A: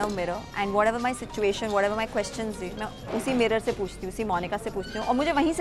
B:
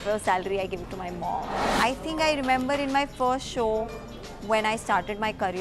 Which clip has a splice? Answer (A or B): B